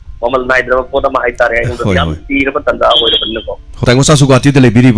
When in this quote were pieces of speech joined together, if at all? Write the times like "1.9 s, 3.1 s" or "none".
3.8 s